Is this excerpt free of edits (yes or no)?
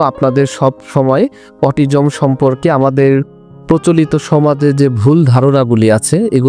yes